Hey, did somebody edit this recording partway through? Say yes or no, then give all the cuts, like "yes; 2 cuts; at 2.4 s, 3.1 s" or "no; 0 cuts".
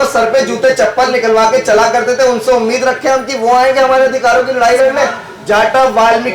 yes; 1 cut; at 5.3 s